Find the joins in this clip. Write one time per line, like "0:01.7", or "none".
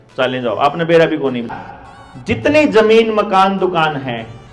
0:01.5